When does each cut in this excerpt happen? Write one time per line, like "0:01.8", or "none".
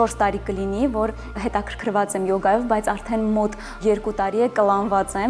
0:01.4
0:03.8